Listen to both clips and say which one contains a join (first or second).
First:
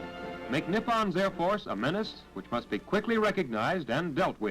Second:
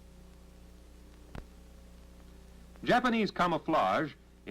first